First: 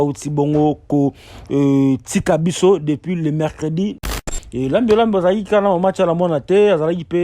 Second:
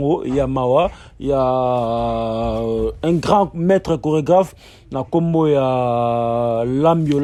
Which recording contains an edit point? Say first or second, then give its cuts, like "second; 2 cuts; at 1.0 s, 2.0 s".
first; 1 cut; at 4.1 s